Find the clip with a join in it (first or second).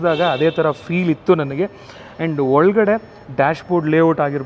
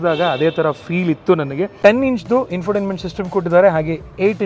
second